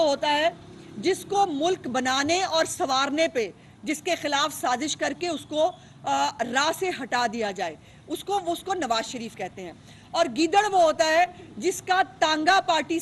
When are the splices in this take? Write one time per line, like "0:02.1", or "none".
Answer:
none